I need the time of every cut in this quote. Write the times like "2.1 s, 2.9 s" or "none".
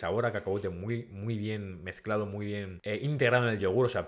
2.7 s